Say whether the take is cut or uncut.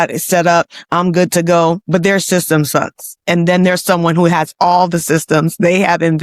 cut